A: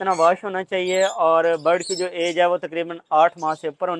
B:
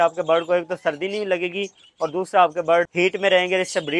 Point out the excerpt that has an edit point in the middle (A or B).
B